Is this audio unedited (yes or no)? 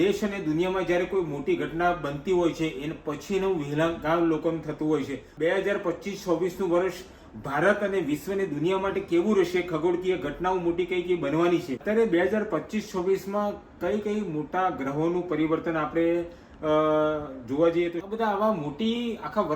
no